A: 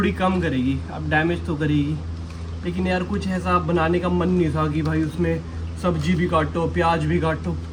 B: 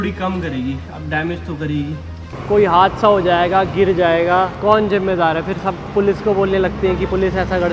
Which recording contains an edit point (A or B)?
B